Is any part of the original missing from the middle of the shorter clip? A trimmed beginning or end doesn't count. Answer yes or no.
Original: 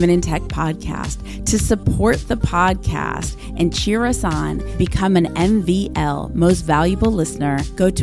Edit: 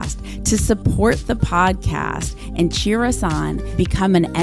no